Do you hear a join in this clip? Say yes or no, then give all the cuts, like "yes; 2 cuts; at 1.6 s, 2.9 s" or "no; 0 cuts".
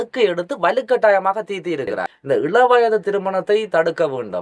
yes; 1 cut; at 2.1 s